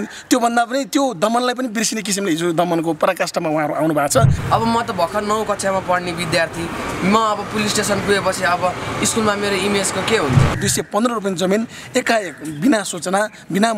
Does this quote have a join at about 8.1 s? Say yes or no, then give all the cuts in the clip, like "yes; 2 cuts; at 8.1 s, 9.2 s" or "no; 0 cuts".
no; 2 cuts; at 4.4 s, 10.6 s